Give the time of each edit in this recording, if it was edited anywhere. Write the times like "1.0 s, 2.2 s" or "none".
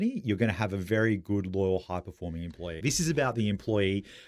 2.7 s